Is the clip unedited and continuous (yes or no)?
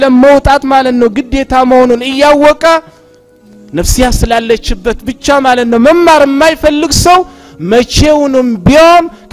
yes